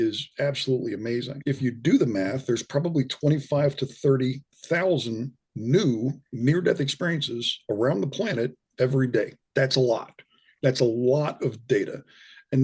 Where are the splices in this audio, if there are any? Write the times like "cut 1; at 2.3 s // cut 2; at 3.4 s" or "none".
cut 1; at 1.3 s // cut 2; at 9.4 s